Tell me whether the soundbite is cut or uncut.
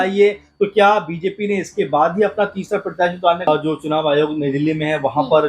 cut